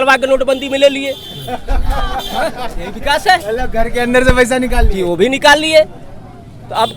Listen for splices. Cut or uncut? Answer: uncut